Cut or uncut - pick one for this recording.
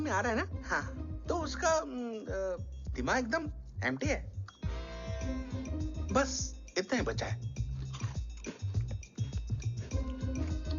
uncut